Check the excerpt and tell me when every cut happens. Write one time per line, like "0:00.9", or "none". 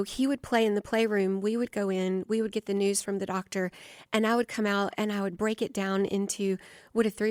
none